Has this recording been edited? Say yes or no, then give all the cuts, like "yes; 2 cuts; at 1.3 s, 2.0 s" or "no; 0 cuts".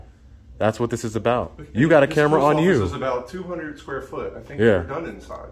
no; 0 cuts